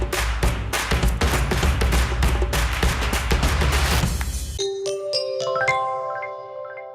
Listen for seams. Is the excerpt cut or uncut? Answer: cut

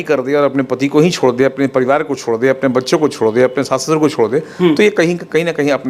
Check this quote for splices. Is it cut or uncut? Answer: uncut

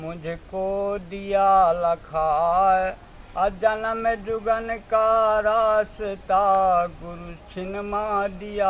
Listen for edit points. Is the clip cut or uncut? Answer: uncut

